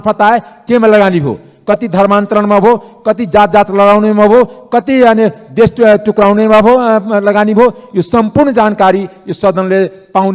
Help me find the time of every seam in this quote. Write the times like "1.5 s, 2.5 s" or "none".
none